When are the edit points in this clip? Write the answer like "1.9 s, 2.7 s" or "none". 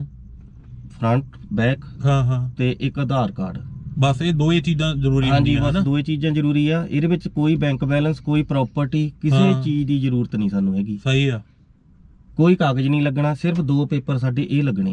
none